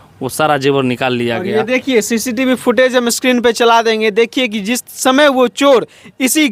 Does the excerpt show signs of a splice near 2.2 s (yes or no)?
no